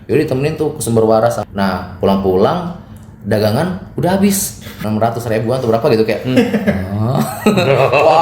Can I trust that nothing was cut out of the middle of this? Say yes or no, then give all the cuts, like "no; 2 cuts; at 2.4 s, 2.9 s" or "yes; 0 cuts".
no; 2 cuts; at 1.4 s, 4.8 s